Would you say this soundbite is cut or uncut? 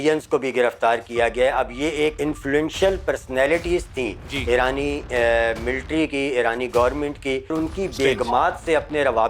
cut